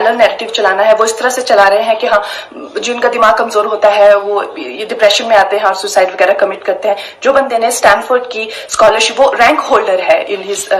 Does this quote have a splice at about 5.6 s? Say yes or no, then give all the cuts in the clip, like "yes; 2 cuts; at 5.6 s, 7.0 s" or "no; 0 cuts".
no; 0 cuts